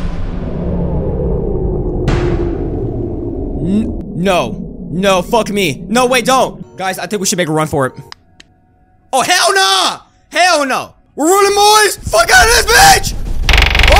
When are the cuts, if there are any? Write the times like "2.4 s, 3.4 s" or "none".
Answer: 4.0 s, 6.6 s, 11.0 s, 12.0 s